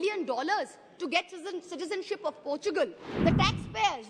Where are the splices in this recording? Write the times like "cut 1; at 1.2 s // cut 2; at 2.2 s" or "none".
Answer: cut 1; at 3.0 s